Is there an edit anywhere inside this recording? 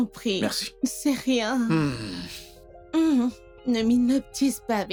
no; 0 cuts

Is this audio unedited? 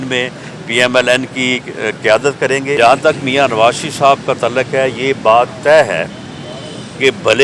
no; 1 cut; at 2.8 s

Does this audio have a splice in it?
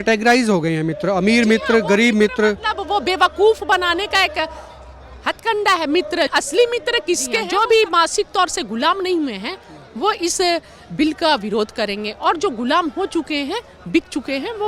yes; 2 cuts; at 6.3 s, 7.5 s

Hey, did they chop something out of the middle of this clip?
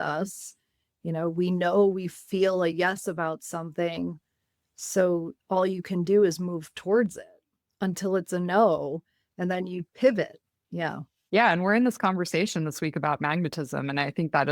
no; 0 cuts

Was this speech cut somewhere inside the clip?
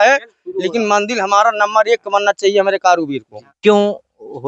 yes; 1 cut; at 3.2 s

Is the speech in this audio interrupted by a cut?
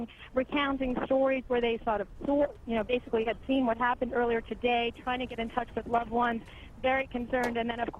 no; 0 cuts

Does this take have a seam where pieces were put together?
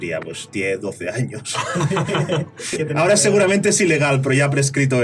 yes; 1 cut; at 2.8 s

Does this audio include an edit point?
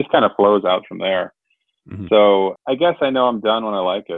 yes; 1 cut; at 2.5 s

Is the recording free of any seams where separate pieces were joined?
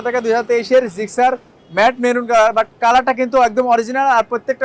yes; 0 cuts

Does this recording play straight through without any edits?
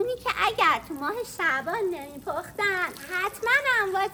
yes; 0 cuts

